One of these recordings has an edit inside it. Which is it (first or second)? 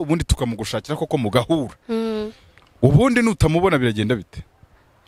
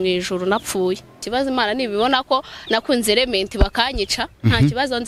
second